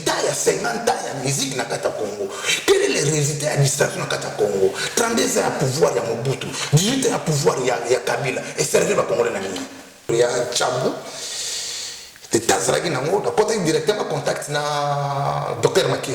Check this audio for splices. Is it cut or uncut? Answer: cut